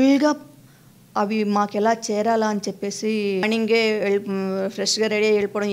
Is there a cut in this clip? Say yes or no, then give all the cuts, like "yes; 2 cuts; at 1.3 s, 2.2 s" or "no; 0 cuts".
yes; 1 cut; at 3.4 s